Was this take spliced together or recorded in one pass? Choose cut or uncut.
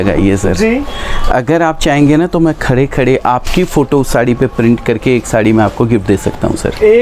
uncut